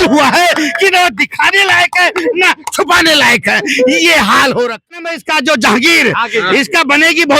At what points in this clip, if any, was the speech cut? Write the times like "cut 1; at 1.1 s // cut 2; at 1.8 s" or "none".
cut 1; at 5.1 s